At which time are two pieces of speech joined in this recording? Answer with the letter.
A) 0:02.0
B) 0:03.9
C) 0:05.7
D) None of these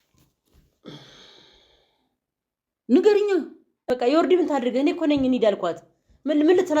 B